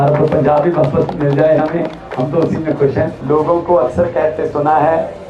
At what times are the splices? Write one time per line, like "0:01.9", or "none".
0:03.2